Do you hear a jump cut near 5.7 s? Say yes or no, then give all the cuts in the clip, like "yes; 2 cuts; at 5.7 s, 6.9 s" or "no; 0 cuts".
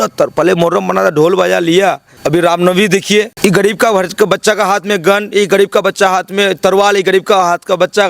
no; 2 cuts; at 2.1 s, 3.3 s